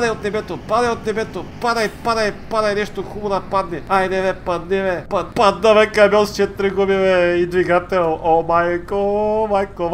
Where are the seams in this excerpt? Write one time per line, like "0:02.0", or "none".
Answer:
0:03.8
0:05.2